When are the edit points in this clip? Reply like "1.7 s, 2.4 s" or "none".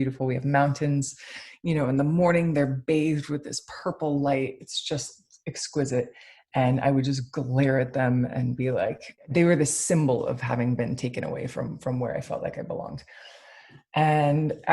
9.1 s